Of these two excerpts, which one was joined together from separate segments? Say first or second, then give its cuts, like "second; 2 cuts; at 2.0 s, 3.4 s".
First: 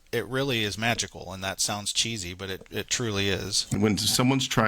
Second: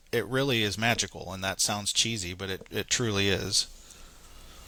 first; 1 cut; at 3.8 s